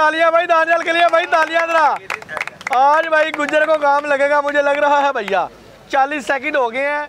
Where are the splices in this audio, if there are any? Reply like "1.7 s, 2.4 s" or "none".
none